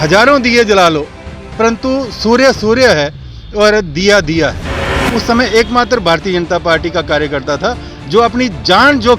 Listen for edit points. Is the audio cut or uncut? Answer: cut